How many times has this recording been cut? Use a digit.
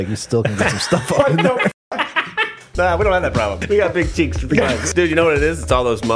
3